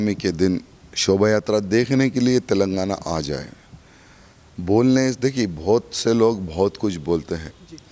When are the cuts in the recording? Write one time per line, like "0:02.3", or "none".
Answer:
none